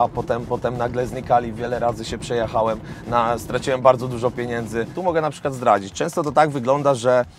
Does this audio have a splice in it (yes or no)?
yes